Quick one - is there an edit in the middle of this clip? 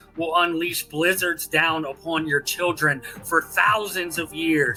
no; 0 cuts

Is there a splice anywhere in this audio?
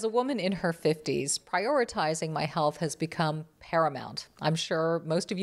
no; 0 cuts

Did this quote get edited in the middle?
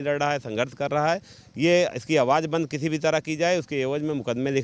no; 0 cuts

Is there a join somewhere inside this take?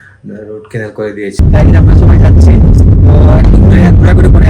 yes; 1 cut; at 1.4 s

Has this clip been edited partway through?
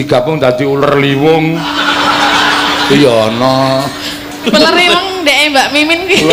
no; 0 cuts

